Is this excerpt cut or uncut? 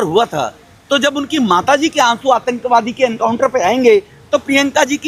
uncut